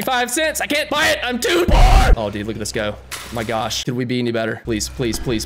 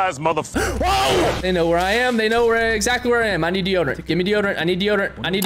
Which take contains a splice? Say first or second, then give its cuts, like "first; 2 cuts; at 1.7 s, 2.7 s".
first; 3 cuts; at 2.1 s, 3.8 s, 4.6 s